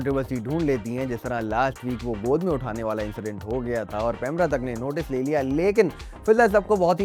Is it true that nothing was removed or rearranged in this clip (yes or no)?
yes